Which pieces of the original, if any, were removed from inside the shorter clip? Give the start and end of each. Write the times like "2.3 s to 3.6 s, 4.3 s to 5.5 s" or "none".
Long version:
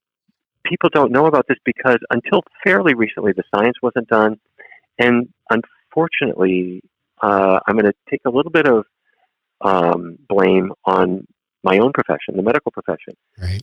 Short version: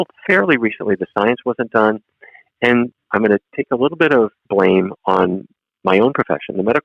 5.4 s to 7.6 s, 8.9 s to 10.2 s

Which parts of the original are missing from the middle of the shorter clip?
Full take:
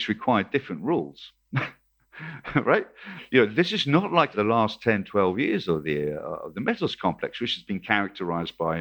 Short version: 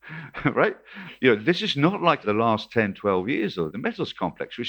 5.8 s to 6.5 s

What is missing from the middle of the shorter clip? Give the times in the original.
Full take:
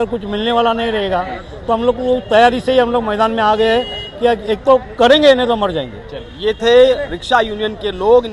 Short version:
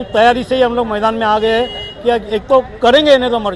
none

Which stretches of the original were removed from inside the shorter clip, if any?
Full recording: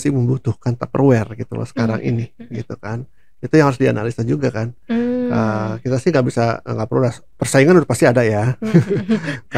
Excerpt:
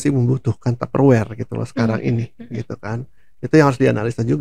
none

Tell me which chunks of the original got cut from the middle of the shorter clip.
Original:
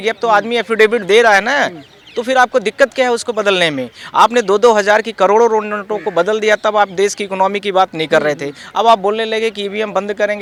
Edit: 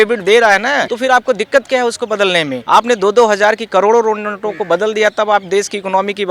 1.7 s to 2.2 s, 3.8 s to 4.0 s

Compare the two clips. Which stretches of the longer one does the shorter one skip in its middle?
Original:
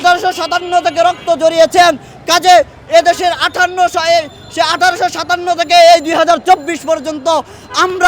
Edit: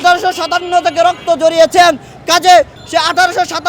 2.8 s to 4.4 s

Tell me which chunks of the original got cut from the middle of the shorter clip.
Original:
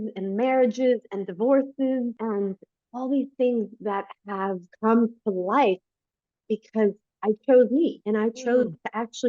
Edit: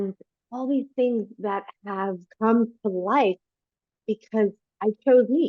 none

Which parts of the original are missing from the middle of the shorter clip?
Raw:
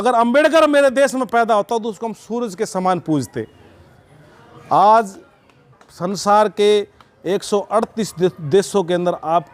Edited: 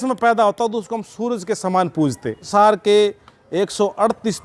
3.5 s to 6.2 s

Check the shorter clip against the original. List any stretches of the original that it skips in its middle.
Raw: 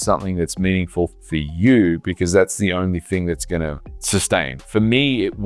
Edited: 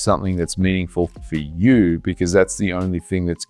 none

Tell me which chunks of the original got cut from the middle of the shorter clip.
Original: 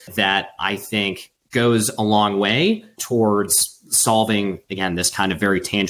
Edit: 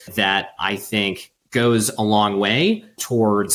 none

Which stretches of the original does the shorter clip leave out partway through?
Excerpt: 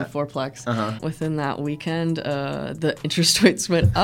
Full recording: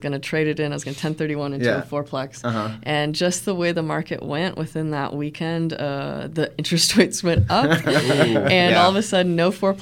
2.8 s to 4.6 s

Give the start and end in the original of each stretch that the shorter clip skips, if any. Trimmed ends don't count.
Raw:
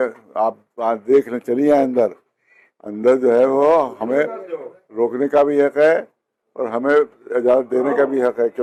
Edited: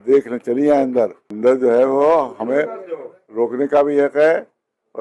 2.2 s to 2.8 s

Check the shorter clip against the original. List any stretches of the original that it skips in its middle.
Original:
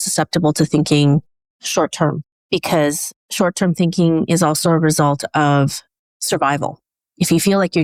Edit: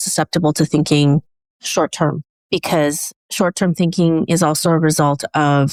none

